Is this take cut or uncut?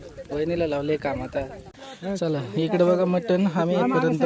cut